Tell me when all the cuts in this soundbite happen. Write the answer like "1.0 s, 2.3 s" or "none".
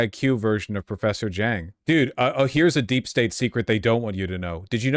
none

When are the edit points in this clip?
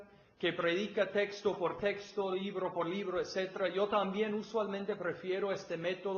none

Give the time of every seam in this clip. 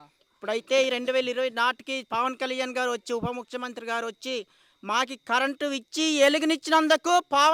none

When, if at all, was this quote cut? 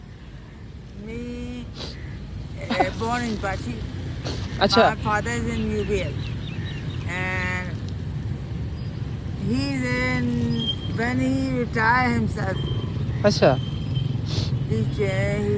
none

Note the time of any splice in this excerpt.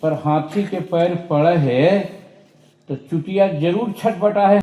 none

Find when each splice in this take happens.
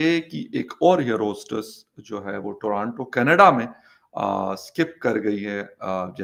none

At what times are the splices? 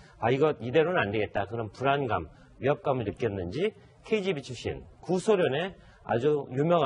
2.5 s

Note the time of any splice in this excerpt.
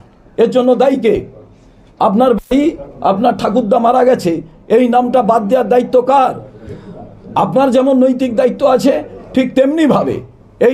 none

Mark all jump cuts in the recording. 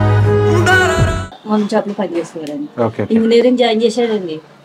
1.4 s

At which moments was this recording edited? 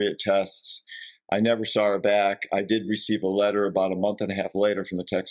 none

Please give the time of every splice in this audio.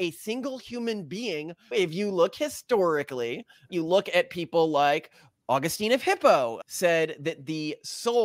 1.7 s, 6.6 s

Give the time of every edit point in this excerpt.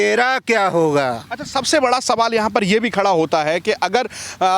none

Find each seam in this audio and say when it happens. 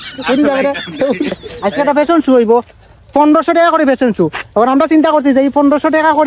1.5 s

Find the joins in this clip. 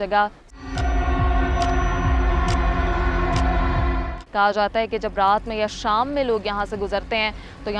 4.2 s

